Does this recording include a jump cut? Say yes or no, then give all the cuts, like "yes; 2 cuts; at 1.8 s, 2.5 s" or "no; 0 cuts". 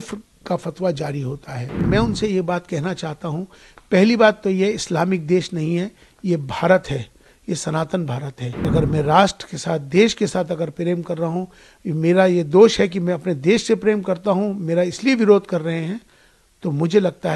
yes; 2 cuts; at 1.8 s, 8.7 s